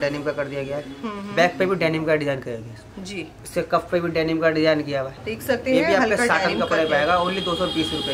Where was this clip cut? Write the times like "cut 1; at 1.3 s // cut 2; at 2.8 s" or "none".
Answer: none